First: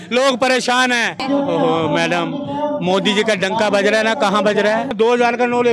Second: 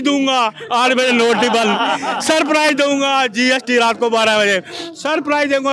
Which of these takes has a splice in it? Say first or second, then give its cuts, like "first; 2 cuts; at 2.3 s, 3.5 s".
first; 2 cuts; at 1.2 s, 4.9 s